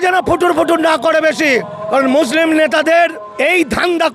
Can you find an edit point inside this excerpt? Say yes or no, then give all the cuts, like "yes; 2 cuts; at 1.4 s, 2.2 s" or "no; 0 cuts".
yes; 2 cuts; at 1.8 s, 3.2 s